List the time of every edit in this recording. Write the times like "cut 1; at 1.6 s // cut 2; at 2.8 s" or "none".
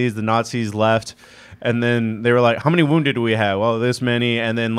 cut 1; at 2.6 s